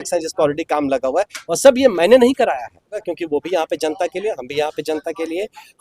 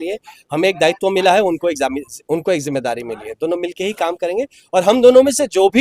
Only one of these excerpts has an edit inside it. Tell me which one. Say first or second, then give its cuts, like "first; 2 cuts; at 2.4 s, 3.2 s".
first; 1 cut; at 3.0 s